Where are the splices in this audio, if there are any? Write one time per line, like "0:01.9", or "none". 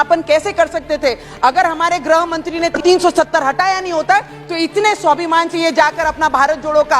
0:02.8